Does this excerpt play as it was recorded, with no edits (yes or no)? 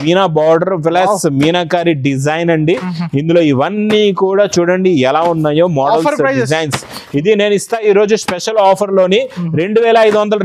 yes